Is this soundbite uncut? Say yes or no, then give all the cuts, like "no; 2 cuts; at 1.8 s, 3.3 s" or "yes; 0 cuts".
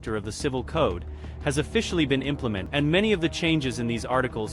no; 1 cut; at 2.6 s